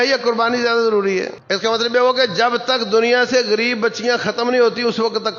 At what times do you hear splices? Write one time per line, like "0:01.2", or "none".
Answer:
0:01.4